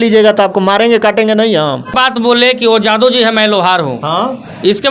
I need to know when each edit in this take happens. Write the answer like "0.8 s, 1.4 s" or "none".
1.9 s